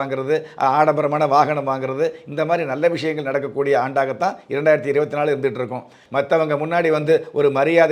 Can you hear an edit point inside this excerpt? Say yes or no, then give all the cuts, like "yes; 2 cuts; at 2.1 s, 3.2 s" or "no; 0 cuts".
yes; 1 cut; at 6.0 s